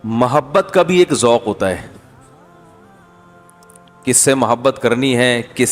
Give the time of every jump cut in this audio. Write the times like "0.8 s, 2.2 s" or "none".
2.0 s, 4.0 s